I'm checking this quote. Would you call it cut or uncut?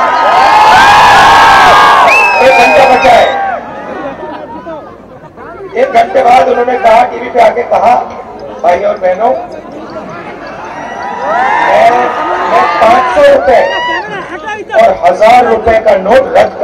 uncut